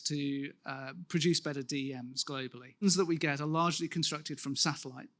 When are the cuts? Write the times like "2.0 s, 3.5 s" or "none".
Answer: none